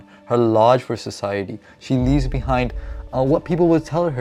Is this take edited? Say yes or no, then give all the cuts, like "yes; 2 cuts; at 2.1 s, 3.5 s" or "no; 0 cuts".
no; 0 cuts